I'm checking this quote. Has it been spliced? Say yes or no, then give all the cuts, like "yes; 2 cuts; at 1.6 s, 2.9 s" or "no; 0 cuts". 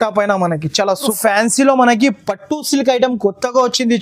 yes; 1 cut; at 1.1 s